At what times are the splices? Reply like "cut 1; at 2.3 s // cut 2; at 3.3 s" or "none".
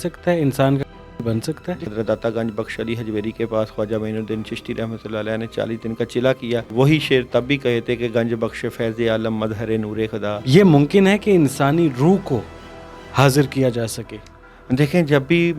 cut 1; at 1.9 s // cut 2; at 6.7 s // cut 3; at 10.4 s // cut 4; at 14.5 s